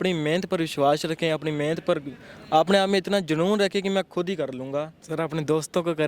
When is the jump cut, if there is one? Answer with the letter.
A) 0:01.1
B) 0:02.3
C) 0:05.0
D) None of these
C